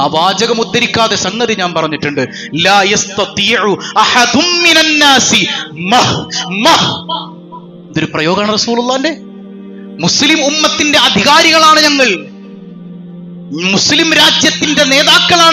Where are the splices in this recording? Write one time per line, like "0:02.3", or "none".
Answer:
none